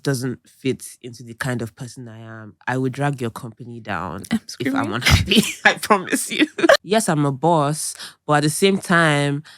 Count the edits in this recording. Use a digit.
1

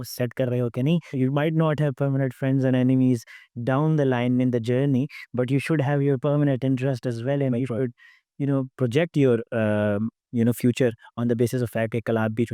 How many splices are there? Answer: 1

